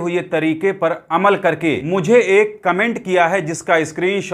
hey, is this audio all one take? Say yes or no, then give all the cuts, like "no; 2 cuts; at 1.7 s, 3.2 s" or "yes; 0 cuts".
no; 1 cut; at 1.8 s